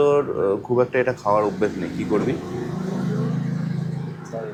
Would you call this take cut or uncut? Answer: uncut